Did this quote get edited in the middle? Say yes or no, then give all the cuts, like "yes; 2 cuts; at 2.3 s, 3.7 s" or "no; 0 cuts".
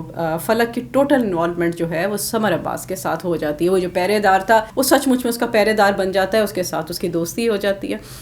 yes; 1 cut; at 4.7 s